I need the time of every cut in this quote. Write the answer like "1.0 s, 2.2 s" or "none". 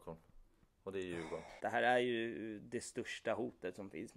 1.5 s